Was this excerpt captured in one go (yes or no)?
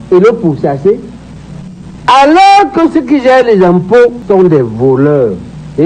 yes